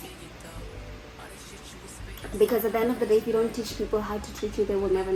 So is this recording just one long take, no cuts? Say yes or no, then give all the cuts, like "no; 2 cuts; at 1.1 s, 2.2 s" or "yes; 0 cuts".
yes; 0 cuts